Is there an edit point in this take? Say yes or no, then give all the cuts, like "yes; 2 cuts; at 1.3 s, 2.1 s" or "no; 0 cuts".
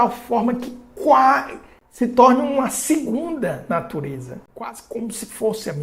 no; 0 cuts